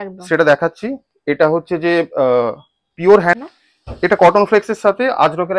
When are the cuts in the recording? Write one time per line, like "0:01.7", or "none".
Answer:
0:03.4

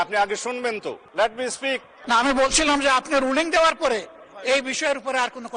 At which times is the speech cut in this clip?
0:01.0
0:01.9

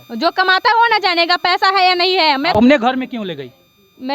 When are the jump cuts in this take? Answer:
0:02.5

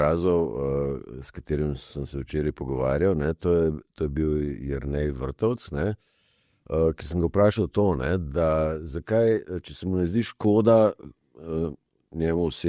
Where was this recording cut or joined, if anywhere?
none

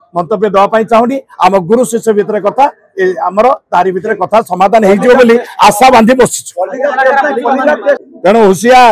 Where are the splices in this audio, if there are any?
0:08.0

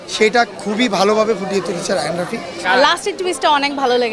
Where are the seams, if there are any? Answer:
0:02.6

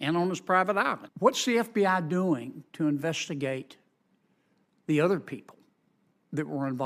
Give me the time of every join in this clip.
0:01.1

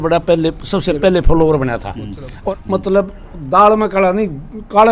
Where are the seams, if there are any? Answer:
0:02.4

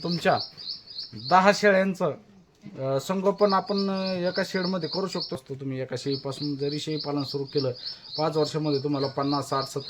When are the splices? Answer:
0:05.4

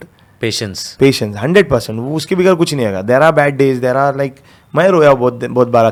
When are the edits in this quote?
none

